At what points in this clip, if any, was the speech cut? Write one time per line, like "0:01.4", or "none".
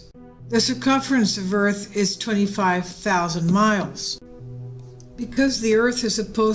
none